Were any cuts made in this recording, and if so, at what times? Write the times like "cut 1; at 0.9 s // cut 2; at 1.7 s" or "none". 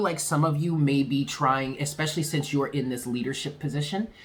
none

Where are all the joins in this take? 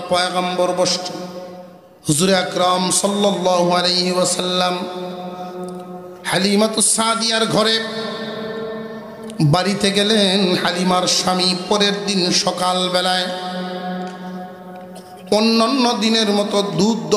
cut 1; at 1.7 s

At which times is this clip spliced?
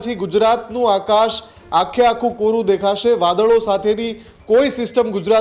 none

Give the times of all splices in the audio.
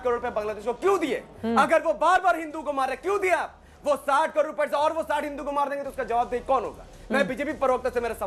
none

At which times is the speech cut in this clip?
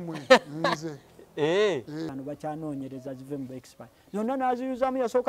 cut 1; at 2.1 s

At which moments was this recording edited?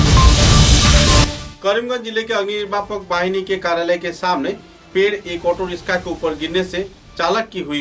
cut 1; at 1.4 s

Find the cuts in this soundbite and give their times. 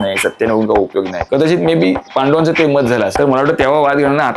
cut 1; at 1.2 s // cut 2; at 2.0 s // cut 3; at 3.1 s

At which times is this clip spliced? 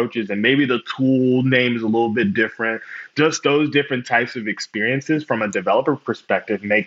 cut 1; at 3.1 s

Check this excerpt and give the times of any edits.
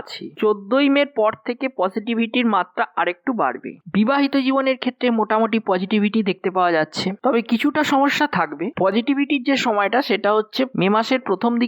cut 1; at 3.8 s

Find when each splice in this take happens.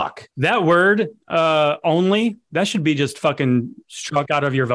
none

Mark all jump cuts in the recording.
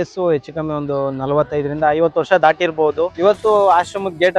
cut 1; at 3.1 s

